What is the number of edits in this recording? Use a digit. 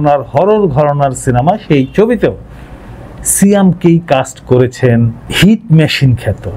0